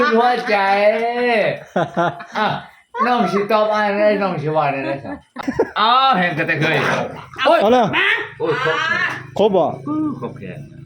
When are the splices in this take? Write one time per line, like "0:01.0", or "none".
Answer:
0:05.4